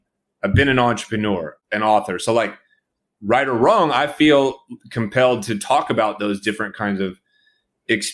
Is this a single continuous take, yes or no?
yes